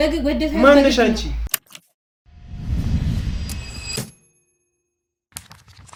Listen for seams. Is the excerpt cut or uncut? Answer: uncut